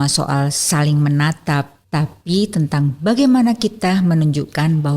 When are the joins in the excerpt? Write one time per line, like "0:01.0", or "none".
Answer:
0:01.8

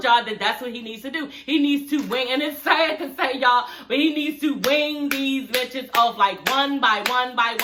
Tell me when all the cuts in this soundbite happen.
none

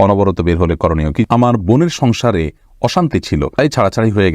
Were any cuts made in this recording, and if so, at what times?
0:01.3
0:03.5

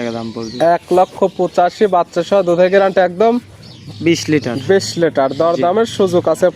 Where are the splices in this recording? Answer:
none

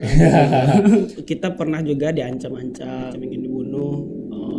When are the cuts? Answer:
0:01.2
0:03.1

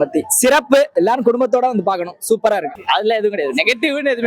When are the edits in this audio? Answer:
0:00.9
0:02.7

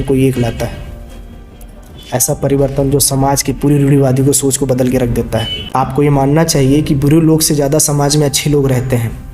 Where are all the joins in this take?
0:05.6

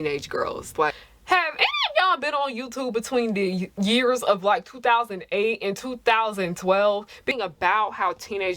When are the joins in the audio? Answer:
0:00.9
0:07.4

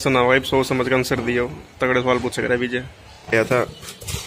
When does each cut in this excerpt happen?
0:03.3

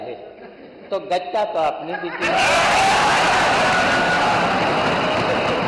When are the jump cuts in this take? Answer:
none

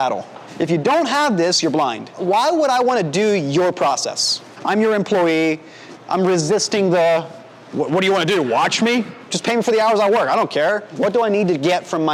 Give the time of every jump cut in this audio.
none

